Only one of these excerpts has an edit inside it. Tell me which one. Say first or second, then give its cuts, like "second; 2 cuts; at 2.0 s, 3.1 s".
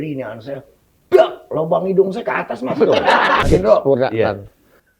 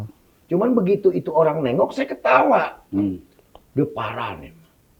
first; 1 cut; at 3.5 s